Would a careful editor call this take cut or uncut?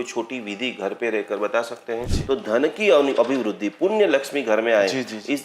cut